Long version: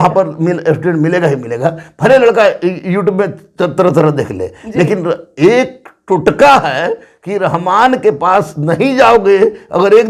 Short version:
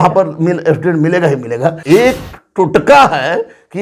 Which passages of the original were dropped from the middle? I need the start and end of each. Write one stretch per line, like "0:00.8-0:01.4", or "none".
0:01.8-0:05.3